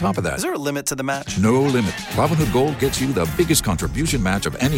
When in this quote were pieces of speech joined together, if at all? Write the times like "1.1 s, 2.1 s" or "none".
none